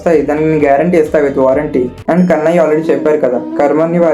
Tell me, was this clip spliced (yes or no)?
no